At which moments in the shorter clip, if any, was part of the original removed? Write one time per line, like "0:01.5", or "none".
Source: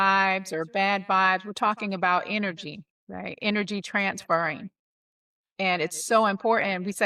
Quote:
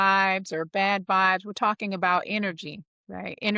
none